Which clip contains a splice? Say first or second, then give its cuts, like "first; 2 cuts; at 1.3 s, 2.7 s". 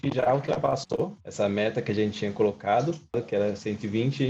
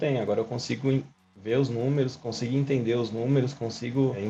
first; 1 cut; at 3.2 s